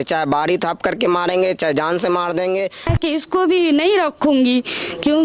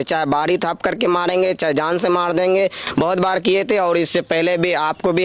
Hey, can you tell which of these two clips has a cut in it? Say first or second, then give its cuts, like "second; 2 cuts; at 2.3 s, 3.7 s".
first; 1 cut; at 2.9 s